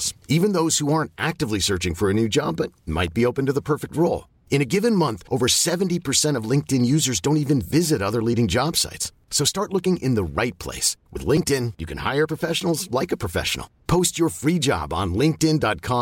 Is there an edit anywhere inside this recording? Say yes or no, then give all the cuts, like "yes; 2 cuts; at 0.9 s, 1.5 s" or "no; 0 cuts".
no; 0 cuts